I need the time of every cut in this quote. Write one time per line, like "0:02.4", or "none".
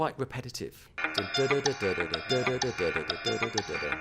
0:00.9